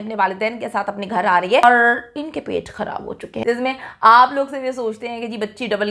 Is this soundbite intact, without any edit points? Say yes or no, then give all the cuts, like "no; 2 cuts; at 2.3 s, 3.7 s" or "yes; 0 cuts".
no; 2 cuts; at 1.6 s, 3.3 s